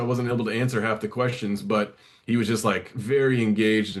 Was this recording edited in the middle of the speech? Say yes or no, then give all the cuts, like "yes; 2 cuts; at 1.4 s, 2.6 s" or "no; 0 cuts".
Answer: no; 0 cuts